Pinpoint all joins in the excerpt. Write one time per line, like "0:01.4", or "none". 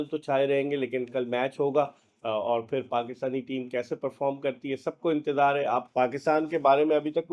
0:05.9